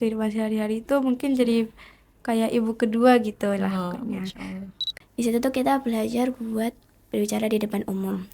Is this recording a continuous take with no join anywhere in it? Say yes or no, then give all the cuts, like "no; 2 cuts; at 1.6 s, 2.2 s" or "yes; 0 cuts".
no; 1 cut; at 5.0 s